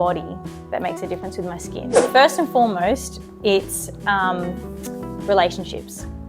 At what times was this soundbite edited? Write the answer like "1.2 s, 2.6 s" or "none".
2.0 s

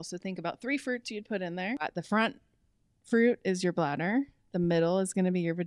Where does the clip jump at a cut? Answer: 1.8 s

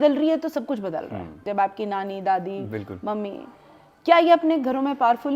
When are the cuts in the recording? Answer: 1.4 s

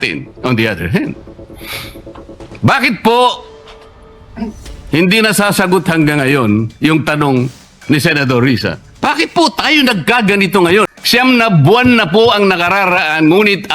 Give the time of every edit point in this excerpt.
10.8 s

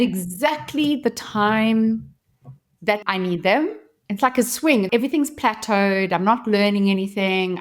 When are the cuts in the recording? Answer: 3.0 s, 3.9 s, 4.9 s

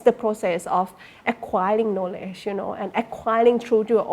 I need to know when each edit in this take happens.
none

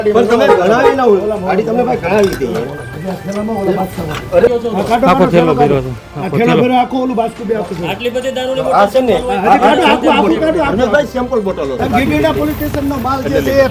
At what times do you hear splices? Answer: 4.5 s, 11.8 s

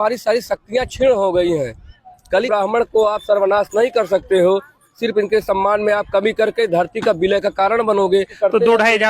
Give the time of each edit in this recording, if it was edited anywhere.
2.5 s, 8.4 s

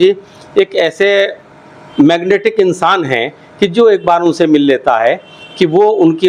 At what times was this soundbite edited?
none

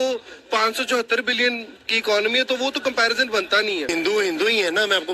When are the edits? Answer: 3.9 s

